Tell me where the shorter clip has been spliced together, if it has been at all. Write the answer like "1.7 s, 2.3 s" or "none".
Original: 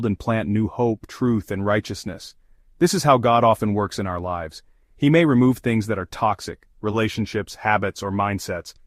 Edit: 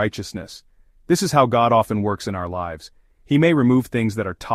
none